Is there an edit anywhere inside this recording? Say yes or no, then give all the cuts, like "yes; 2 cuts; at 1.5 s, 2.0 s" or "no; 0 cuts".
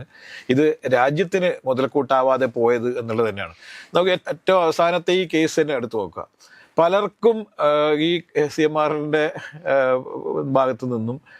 no; 0 cuts